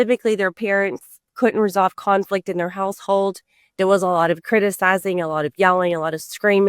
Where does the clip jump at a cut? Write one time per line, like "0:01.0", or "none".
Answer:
0:01.3